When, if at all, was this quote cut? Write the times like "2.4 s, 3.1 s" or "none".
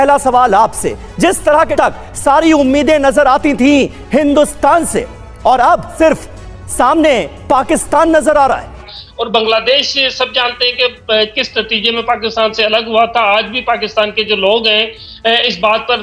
1.7 s, 5.9 s, 9.0 s